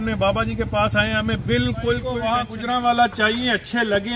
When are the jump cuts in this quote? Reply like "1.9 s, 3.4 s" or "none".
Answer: 2.2 s